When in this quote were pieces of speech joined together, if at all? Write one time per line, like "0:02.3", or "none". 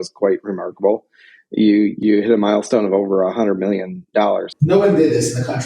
0:02.0
0:04.5